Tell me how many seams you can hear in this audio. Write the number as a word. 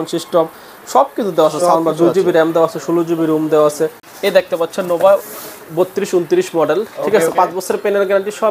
one